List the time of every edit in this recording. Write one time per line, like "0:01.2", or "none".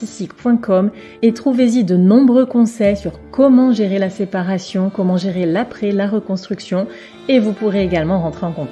none